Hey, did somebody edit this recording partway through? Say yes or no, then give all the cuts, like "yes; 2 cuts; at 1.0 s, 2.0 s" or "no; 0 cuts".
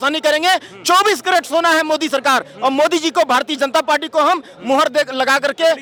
no; 0 cuts